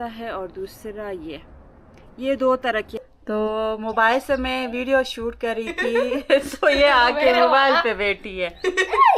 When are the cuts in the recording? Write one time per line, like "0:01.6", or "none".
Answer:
0:03.0